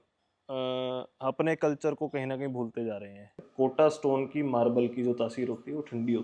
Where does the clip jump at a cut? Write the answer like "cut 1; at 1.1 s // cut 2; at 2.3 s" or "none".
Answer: cut 1; at 3.4 s

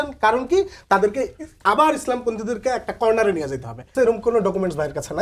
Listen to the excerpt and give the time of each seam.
cut 1; at 3.9 s

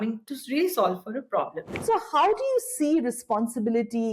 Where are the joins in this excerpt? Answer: cut 1; at 1.6 s

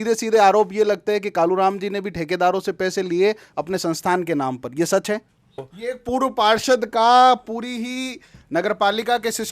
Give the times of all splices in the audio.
cut 1; at 5.5 s

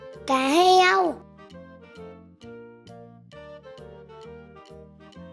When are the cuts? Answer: none

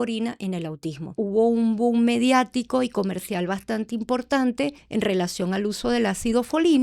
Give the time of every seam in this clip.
cut 1; at 1.2 s // cut 2; at 4.8 s

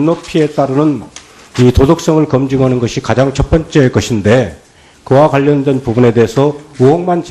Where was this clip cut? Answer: none

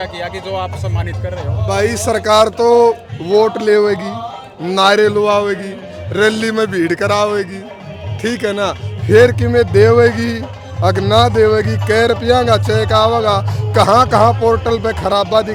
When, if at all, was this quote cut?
none

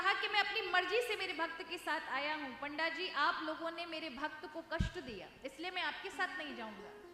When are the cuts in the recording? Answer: none

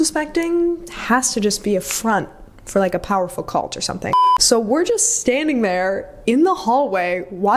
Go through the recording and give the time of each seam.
cut 1; at 4.1 s

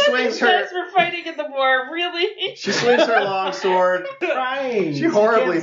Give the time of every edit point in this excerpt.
cut 1; at 4.2 s

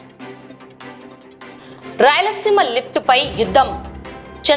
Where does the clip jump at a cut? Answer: cut 1; at 1.6 s

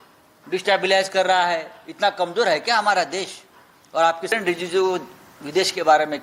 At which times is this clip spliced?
cut 1; at 4.3 s

